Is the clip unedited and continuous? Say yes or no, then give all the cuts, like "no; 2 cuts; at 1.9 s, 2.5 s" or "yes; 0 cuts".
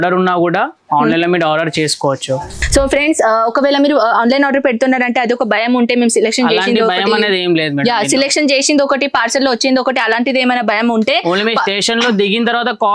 no; 1 cut; at 2.5 s